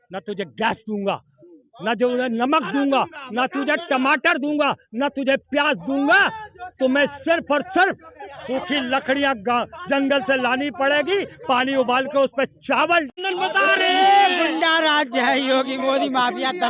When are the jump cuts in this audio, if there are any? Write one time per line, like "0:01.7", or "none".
0:13.2